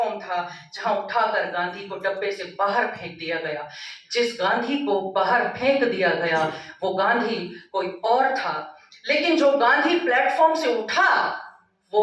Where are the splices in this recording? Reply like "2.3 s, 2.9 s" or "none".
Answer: none